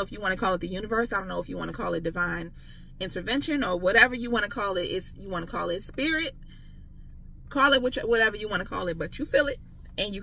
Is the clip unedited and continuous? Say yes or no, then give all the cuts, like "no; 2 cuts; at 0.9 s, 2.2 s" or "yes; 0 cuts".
yes; 0 cuts